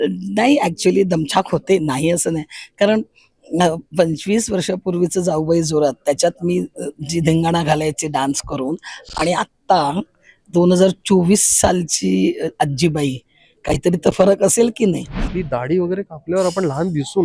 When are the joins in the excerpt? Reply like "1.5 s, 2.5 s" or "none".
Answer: 15.3 s